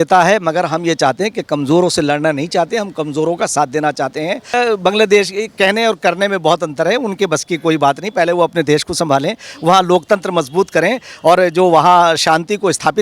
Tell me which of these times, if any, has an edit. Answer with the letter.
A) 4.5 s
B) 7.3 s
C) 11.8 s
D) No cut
A